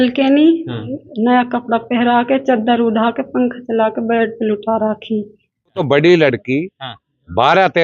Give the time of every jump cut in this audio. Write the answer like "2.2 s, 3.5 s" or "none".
5.8 s